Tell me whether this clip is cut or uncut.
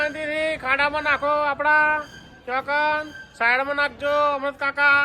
uncut